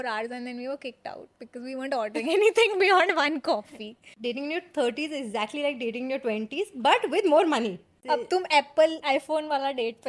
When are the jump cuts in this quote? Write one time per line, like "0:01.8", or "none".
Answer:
0:04.1
0:07.9

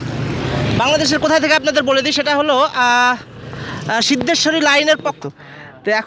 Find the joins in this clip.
0:05.2

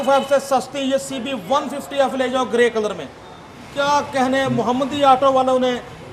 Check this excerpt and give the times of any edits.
none

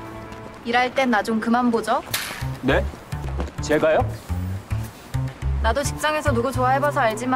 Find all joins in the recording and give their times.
0:02.0

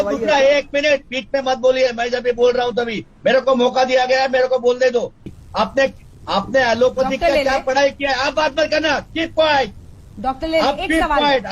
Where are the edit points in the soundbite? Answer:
0:05.3

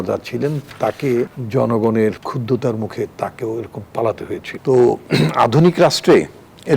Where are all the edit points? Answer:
0:01.4
0:02.2
0:04.5

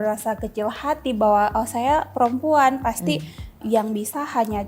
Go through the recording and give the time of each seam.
0:03.6

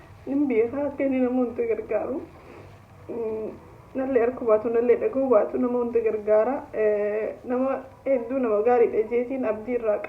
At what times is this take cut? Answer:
none

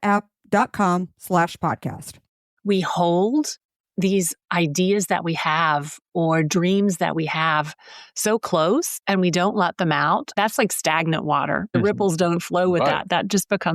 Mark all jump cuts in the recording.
0:02.3
0:09.0
0:10.3
0:11.7

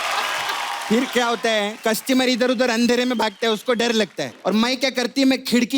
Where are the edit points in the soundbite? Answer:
0:01.8
0:04.3

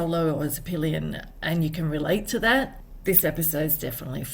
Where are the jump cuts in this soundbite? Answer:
0:02.8

